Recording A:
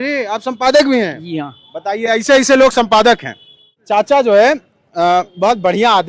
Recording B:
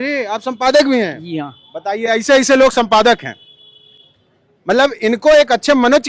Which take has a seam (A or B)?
A